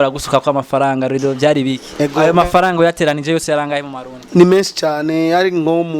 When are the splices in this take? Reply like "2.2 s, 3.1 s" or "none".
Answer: 1.9 s